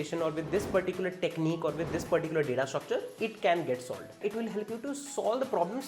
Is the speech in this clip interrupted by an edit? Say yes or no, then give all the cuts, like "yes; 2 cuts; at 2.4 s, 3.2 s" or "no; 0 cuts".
yes; 1 cut; at 4.2 s